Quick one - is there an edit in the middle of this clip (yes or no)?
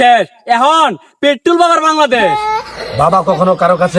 yes